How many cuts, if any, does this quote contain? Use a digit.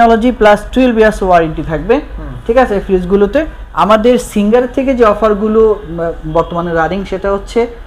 1